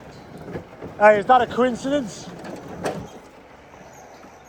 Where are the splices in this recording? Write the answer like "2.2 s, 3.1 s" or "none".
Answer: none